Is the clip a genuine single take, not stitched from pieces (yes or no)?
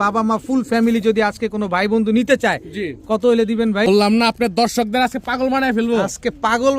no